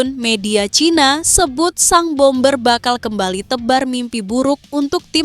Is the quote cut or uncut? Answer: uncut